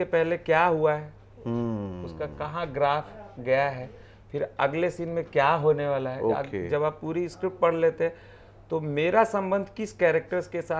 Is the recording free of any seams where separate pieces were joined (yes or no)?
yes